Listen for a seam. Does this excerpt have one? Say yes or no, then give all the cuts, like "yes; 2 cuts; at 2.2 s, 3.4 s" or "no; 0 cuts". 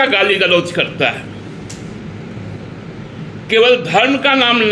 no; 0 cuts